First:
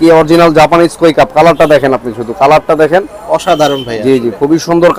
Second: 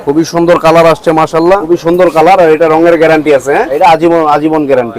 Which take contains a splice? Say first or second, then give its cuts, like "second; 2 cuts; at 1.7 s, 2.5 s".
second; 2 cuts; at 1.6 s, 3.7 s